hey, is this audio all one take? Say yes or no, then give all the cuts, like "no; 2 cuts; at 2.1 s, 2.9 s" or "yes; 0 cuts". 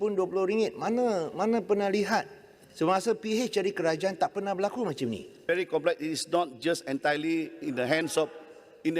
no; 1 cut; at 5.4 s